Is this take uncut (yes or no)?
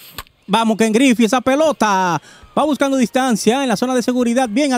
yes